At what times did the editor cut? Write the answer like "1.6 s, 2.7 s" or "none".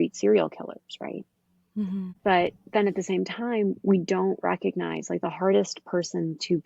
2.2 s